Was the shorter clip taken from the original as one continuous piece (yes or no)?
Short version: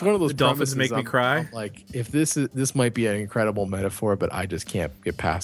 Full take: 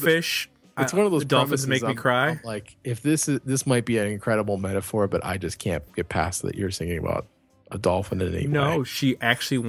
yes